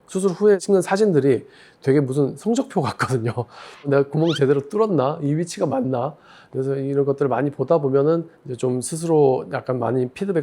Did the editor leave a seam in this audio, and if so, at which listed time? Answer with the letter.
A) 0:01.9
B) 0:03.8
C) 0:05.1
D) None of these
B